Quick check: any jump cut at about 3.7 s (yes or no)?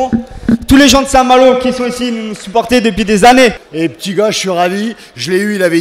yes